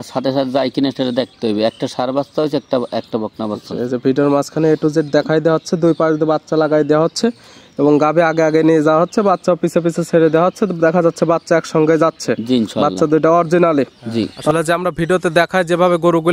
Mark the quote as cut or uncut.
cut